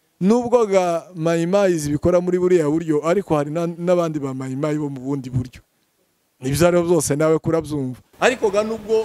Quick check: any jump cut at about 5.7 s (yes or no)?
no